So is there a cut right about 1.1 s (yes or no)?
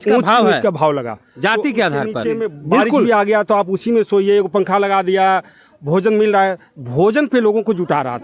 no